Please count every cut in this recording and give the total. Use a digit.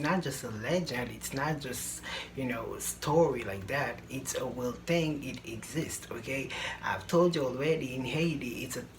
0